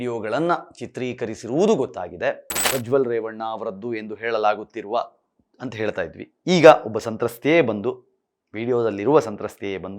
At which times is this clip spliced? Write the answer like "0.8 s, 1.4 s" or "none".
2.5 s